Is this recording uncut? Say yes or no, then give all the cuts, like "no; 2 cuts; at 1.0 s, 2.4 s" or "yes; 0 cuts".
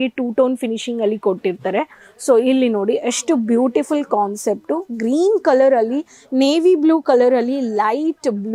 yes; 0 cuts